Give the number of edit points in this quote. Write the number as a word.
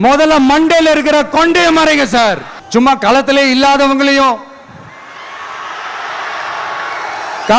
one